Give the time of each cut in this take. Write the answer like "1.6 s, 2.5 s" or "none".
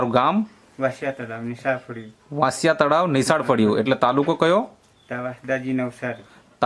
none

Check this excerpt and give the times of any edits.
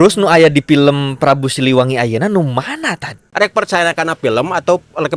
3.2 s

